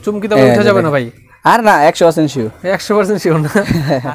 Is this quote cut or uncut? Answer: uncut